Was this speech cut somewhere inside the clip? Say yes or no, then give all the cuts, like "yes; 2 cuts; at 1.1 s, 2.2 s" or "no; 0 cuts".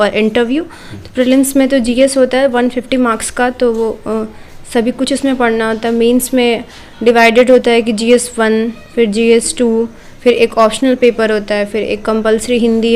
no; 0 cuts